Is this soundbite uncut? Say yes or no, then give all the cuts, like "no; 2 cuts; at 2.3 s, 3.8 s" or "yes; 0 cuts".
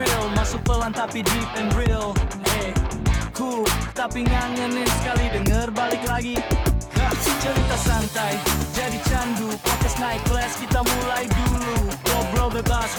yes; 0 cuts